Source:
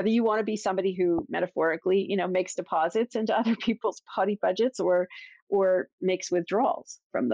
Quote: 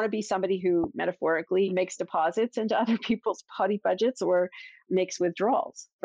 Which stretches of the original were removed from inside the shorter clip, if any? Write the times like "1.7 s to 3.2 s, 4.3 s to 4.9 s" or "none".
2.1 s to 2.3 s, 5.4 s to 5.9 s